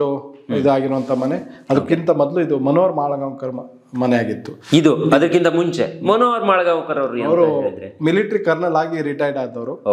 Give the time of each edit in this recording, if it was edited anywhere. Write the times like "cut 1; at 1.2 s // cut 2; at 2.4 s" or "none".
none